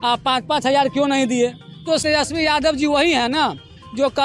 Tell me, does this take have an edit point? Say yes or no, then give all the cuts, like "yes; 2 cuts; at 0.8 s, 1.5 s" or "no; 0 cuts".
yes; 1 cut; at 2.0 s